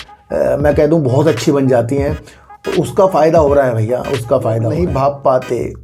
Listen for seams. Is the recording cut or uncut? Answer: cut